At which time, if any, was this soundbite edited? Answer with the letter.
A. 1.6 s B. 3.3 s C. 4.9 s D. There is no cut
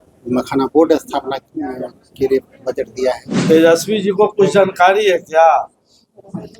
B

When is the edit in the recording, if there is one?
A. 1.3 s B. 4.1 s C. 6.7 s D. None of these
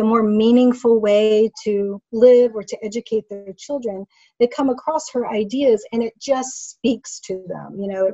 D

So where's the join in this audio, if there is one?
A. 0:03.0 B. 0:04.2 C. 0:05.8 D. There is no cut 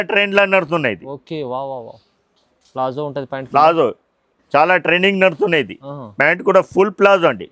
D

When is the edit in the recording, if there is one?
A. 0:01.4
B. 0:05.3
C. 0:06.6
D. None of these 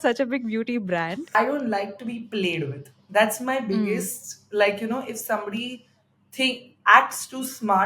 A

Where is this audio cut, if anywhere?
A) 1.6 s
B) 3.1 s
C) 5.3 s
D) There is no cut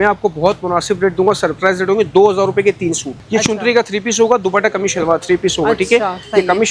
B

